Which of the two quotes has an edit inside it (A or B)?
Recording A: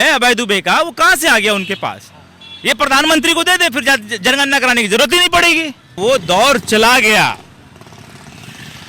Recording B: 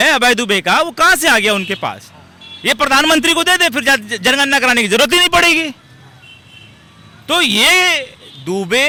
A